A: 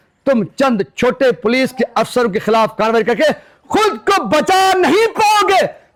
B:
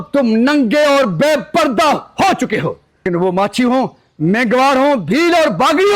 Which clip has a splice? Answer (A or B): B